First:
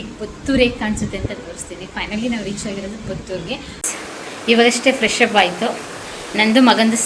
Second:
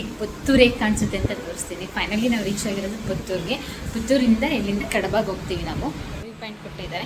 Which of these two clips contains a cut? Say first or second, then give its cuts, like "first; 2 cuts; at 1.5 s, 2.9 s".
first; 1 cut; at 3.8 s